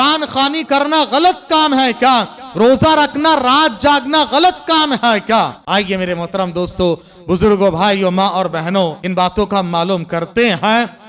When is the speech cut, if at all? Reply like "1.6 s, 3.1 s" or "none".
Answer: 5.6 s, 9.0 s